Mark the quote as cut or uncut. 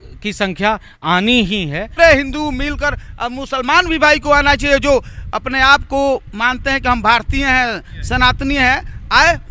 cut